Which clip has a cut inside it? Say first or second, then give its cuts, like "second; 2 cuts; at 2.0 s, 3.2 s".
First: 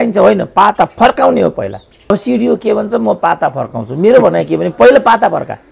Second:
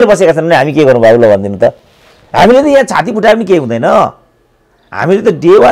first; 1 cut; at 2.1 s